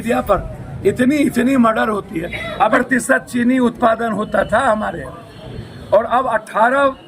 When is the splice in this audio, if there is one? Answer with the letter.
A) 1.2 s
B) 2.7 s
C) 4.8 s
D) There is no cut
B